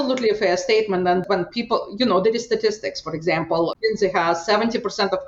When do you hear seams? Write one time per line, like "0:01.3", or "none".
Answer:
0:01.2
0:03.7